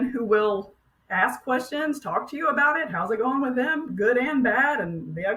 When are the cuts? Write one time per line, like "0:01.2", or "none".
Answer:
none